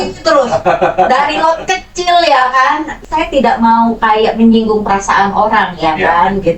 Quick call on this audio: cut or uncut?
cut